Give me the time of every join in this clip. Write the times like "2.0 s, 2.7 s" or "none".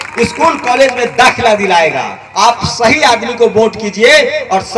2.2 s